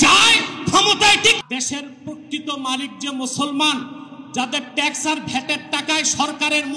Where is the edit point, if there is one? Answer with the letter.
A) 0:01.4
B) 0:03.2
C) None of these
A